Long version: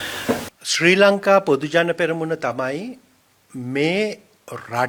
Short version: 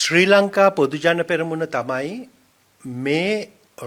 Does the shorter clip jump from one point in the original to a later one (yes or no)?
no